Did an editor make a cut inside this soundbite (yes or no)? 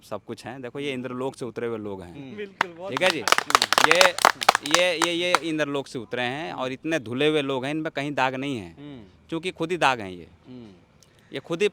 no